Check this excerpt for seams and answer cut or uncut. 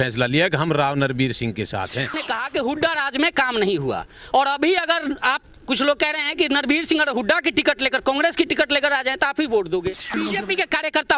cut